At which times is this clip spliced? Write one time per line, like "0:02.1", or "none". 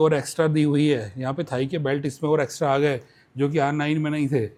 none

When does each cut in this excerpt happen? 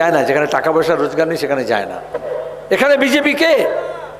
0:02.3

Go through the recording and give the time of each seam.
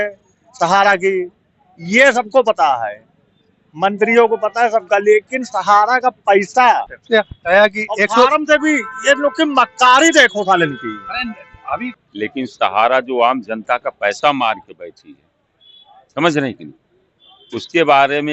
0:07.0
0:11.9

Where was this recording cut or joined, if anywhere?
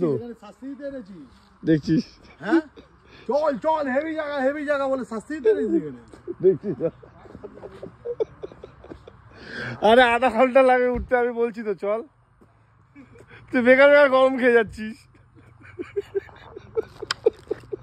none

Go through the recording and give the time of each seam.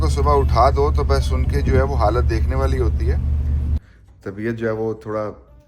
0:03.6

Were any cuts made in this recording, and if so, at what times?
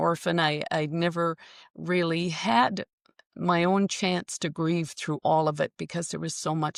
none

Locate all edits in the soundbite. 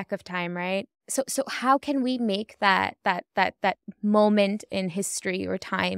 0:01.0

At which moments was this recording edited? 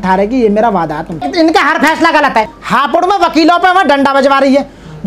0:01.3
0:02.6

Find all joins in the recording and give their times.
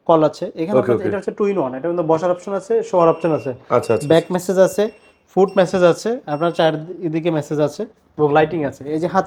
none

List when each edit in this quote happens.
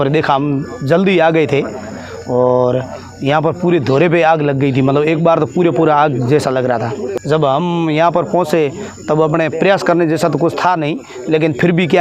0:07.2

